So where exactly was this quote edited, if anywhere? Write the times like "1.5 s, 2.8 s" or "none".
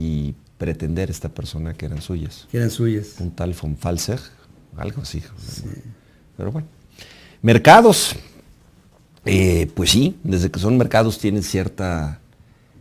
6.3 s